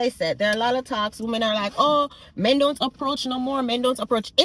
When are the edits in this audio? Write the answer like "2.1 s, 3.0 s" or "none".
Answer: none